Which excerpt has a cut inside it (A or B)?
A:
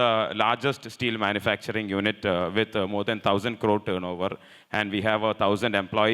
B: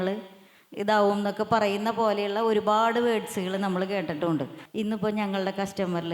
B